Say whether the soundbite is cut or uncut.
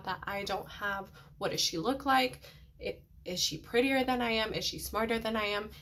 uncut